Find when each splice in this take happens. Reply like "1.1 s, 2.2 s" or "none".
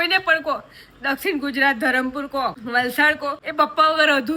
2.6 s, 3.4 s